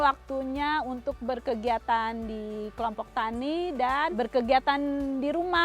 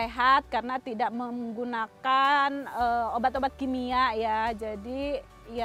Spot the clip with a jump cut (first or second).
first